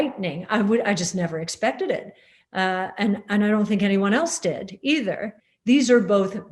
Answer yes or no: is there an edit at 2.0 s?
no